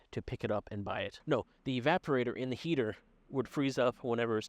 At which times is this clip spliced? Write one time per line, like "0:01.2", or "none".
0:01.1